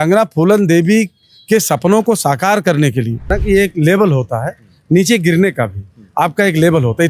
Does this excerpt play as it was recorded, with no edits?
no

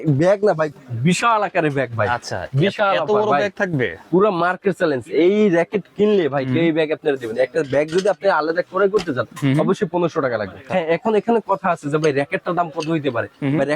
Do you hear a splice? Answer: yes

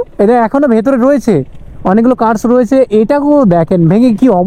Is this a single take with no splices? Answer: yes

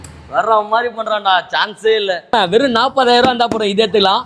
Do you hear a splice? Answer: yes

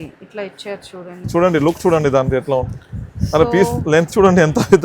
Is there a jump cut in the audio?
yes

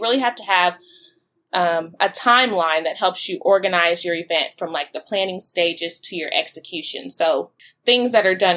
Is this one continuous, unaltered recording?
no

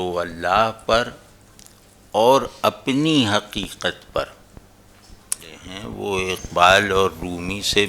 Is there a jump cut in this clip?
yes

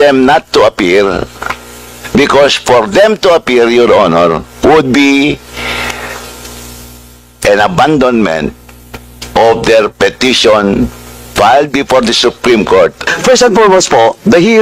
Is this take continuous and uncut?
no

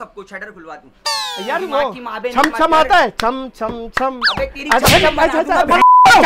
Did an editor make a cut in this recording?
no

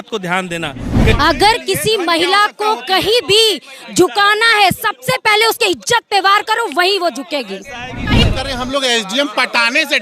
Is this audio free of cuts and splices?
no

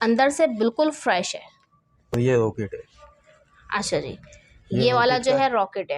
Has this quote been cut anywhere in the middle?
yes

